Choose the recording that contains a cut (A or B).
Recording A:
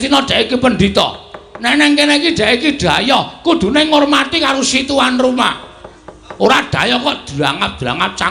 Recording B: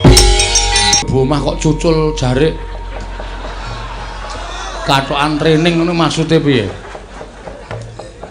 B